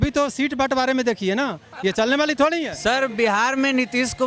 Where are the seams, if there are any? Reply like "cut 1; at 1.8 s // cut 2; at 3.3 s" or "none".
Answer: cut 1; at 2.7 s